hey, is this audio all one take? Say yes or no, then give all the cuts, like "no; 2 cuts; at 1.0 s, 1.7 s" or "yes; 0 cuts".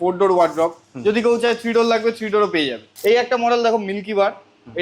no; 1 cut; at 2.8 s